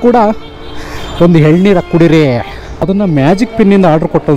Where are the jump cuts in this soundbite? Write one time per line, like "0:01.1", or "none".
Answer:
0:02.8